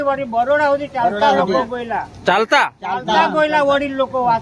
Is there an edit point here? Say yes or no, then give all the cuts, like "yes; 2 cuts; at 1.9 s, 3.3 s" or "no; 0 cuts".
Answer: no; 0 cuts